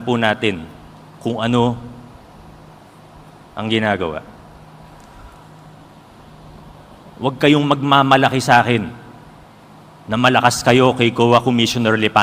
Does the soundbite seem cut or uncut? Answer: uncut